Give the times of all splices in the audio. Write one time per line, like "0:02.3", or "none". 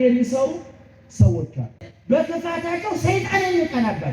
0:01.9